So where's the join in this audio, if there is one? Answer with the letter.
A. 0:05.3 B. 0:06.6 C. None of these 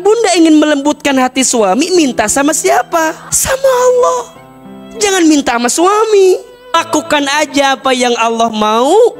C